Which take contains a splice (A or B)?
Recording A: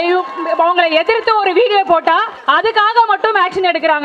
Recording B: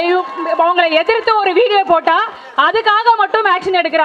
A